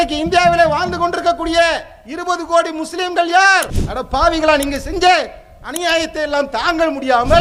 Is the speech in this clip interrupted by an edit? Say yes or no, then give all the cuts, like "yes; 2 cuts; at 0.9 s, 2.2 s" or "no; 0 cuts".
no; 0 cuts